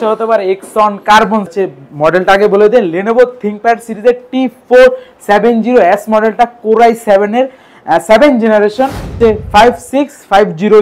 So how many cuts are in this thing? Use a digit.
2